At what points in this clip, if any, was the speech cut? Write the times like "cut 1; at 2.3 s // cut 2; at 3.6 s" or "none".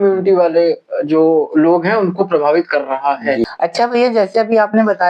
cut 1; at 3.5 s